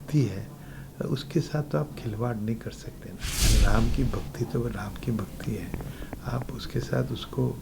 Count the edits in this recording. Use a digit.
1